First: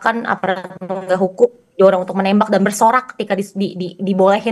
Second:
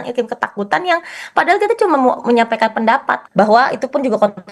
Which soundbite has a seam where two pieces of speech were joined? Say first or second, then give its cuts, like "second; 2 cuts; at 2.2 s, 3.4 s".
second; 1 cut; at 3.2 s